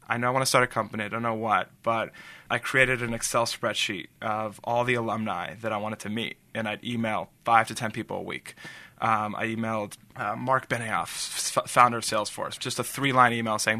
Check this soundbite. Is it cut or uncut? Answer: cut